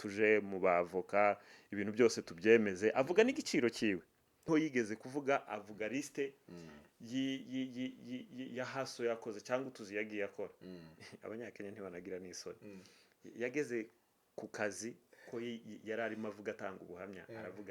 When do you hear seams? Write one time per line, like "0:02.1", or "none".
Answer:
0:04.4